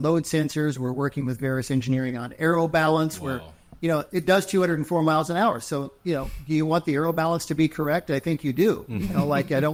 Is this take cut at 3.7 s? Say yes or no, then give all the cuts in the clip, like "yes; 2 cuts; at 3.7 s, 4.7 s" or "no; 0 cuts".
no; 0 cuts